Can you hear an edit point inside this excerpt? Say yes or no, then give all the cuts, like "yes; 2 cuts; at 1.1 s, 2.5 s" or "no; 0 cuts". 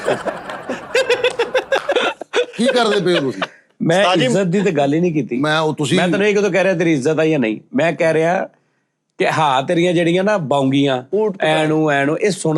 no; 0 cuts